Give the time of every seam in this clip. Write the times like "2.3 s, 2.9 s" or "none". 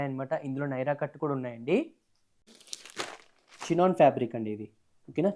2.5 s

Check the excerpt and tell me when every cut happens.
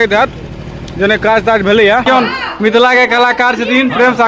2.1 s

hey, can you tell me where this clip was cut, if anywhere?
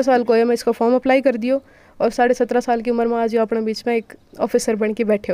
none

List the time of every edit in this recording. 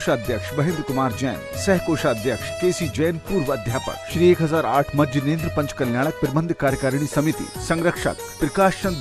2.5 s, 4.0 s

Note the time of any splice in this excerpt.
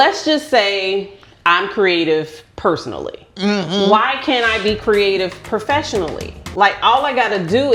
none

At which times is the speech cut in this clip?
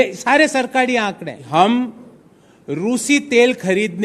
1.4 s

